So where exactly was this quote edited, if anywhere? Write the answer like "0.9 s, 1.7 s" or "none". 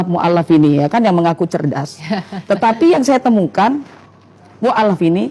none

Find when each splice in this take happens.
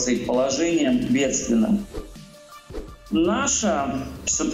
2.5 s

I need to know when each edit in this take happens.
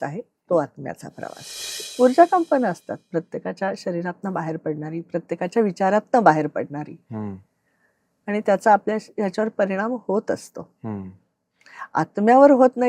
1.9 s

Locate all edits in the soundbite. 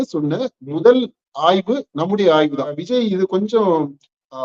2.8 s

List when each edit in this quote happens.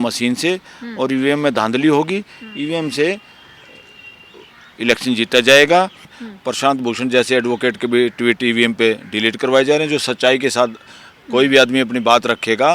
6.1 s

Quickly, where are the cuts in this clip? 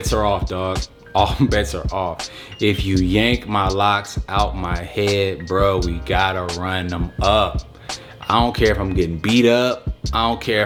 none

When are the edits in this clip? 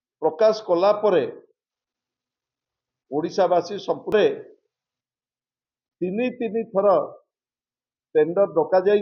4.1 s

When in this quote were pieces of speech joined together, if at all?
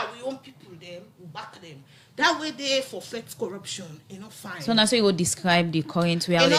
none

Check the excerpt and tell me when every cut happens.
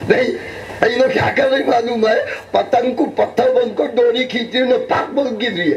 none

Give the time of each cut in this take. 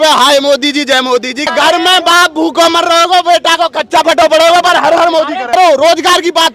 1.5 s, 5.5 s

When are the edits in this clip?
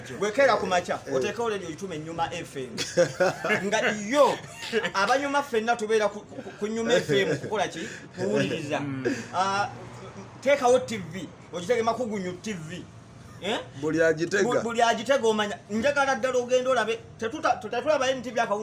none

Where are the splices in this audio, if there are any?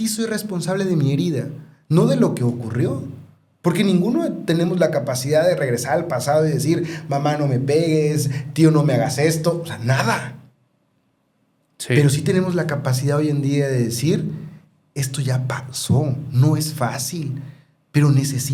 none

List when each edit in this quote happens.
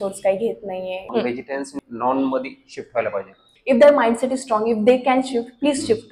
1.5 s, 3.5 s

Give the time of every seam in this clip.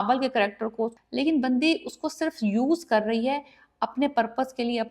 1.0 s

